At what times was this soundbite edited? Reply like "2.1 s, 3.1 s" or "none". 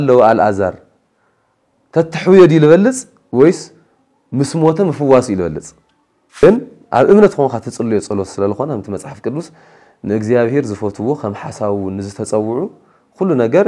6.4 s